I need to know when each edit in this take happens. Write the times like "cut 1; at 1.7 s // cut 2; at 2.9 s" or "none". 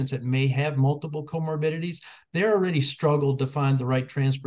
none

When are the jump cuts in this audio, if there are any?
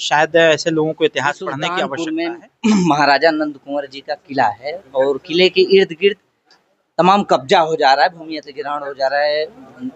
cut 1; at 1.8 s

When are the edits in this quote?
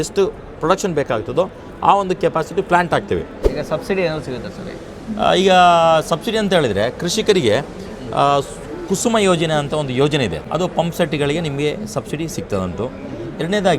cut 1; at 3.4 s // cut 2; at 10.4 s

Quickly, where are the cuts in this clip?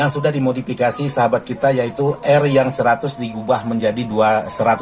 none

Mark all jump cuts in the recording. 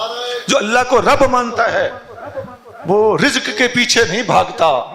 none

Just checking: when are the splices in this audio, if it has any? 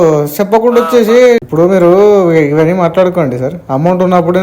cut 1; at 1.4 s

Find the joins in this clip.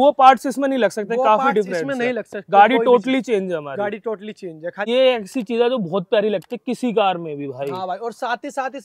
cut 1; at 4.9 s

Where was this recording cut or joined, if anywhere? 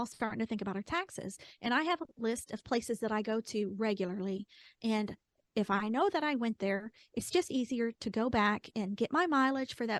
none

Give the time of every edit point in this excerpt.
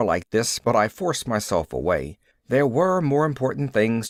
none

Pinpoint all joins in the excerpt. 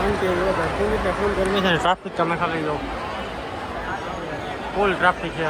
none

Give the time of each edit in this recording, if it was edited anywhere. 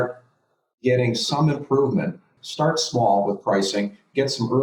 cut 1; at 2.3 s

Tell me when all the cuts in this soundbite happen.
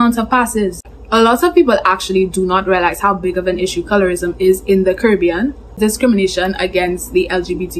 cut 1; at 0.9 s // cut 2; at 5.8 s

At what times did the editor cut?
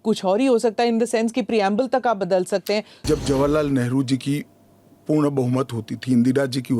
cut 1; at 2.9 s

